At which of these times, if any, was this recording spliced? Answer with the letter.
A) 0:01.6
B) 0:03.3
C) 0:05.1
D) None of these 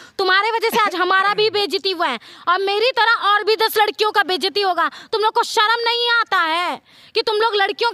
D